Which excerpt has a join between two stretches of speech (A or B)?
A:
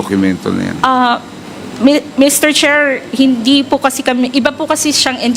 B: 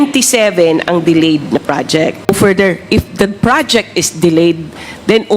B